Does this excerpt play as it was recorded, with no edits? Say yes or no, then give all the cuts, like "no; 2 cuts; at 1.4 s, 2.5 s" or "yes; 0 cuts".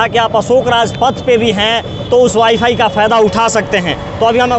yes; 0 cuts